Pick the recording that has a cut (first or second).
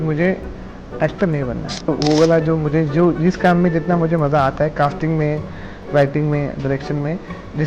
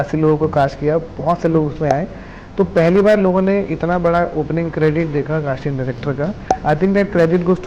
first